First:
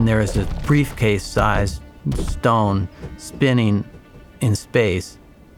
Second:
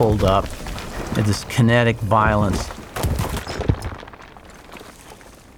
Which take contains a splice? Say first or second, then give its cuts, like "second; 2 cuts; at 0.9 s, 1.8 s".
second; 1 cut; at 2.5 s